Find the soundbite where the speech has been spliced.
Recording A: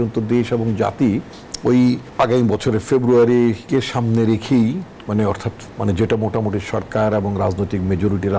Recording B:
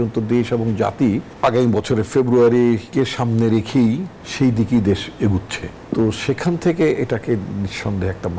B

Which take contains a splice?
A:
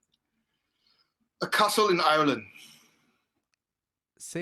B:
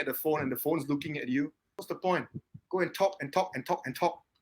B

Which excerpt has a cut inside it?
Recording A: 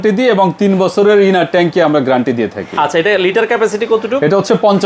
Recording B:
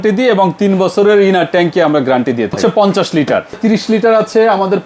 B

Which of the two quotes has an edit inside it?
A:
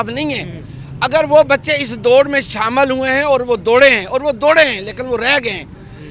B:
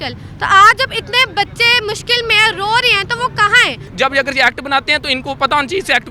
B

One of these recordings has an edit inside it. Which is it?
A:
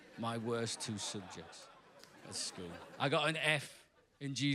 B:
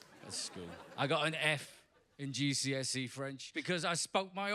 B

